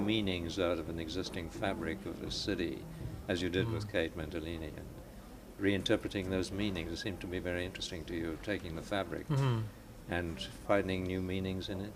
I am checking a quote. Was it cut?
no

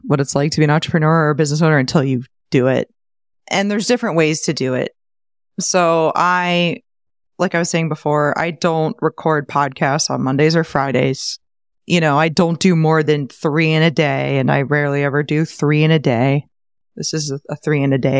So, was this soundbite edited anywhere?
no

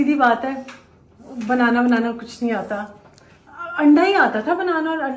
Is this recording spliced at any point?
no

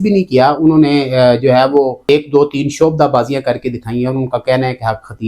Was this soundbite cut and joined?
yes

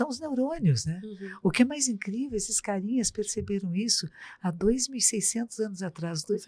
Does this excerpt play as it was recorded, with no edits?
yes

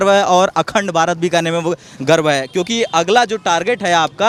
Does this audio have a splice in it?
no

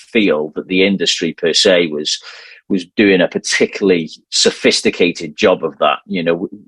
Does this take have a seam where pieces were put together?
no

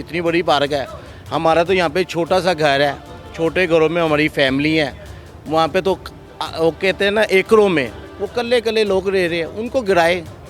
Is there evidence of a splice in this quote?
no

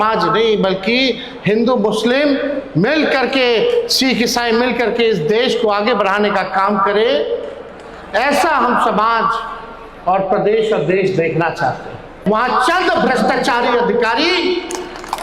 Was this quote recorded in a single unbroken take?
no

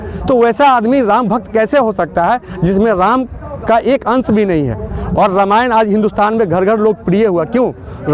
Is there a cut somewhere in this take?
no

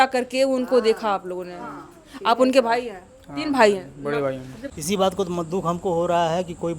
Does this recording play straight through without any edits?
no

